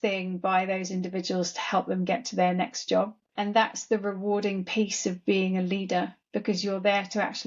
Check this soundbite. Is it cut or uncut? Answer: uncut